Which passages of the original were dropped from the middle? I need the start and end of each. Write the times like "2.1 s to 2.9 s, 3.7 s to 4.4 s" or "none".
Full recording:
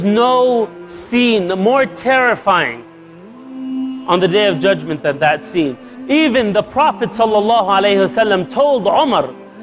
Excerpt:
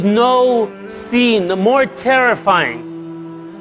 none